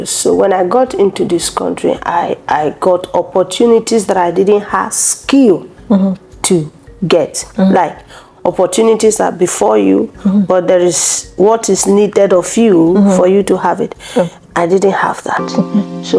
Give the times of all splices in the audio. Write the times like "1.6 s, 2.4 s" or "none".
none